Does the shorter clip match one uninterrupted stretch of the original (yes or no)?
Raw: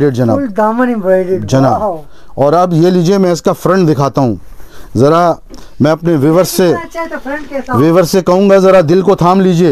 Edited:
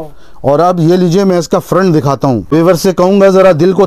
no